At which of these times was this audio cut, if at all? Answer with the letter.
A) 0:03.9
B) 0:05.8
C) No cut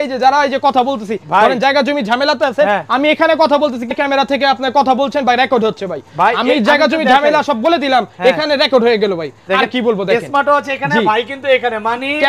A